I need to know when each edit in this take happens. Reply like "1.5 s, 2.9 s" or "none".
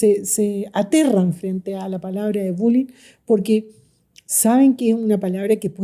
none